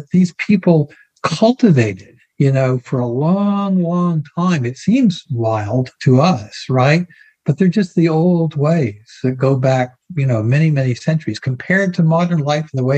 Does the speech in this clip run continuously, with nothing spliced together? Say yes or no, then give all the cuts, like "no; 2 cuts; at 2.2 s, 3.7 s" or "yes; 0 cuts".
yes; 0 cuts